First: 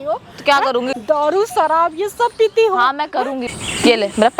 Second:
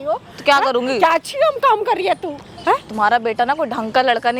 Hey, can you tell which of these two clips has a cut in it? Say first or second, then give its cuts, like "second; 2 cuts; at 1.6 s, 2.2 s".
first; 2 cuts; at 0.9 s, 3.5 s